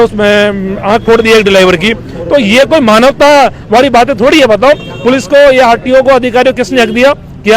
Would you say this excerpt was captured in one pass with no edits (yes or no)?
yes